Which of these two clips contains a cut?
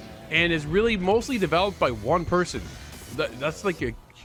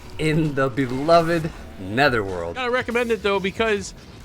second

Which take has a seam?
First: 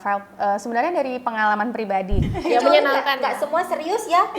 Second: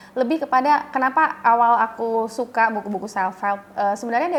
first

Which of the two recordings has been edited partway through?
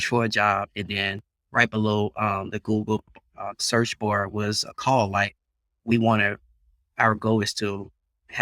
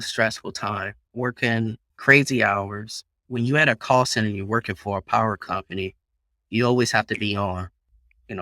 second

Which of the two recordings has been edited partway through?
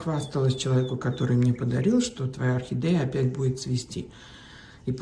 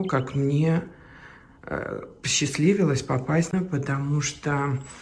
second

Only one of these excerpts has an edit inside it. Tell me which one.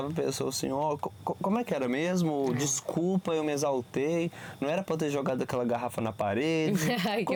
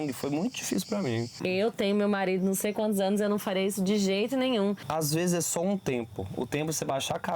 second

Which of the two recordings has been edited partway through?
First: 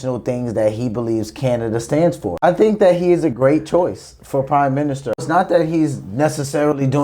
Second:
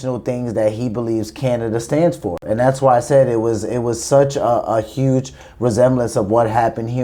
first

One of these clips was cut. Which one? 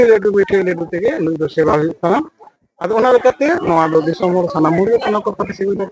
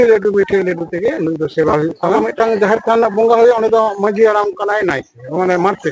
second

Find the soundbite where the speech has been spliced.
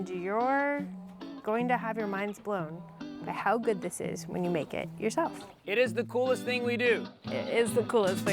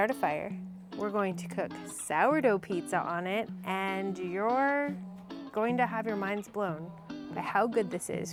first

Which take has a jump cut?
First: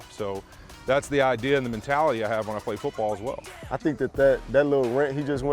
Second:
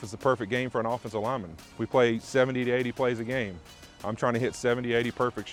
first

